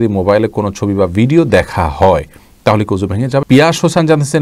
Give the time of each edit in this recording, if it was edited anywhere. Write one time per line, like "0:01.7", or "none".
0:03.4